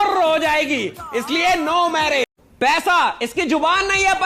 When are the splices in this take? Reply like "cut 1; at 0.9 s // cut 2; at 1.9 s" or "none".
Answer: cut 1; at 2.4 s